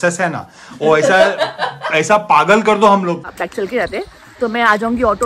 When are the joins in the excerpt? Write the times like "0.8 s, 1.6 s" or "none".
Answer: 3.2 s